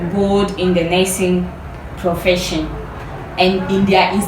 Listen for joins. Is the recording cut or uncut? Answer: cut